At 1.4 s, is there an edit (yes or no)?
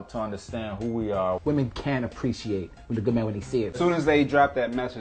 yes